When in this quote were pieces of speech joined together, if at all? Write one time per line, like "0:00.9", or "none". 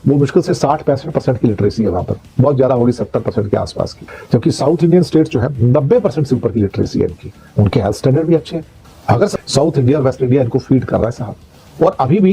0:09.3